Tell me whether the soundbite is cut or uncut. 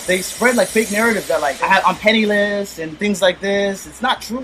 cut